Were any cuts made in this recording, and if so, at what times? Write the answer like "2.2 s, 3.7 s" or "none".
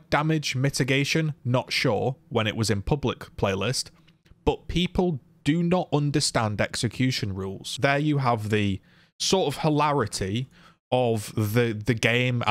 7.7 s